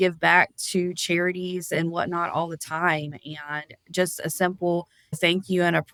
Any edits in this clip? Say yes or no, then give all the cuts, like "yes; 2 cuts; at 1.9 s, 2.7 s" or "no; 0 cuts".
no; 0 cuts